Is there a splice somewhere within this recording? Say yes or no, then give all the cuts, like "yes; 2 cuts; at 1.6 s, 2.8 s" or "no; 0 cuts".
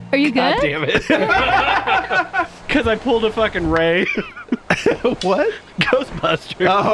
no; 0 cuts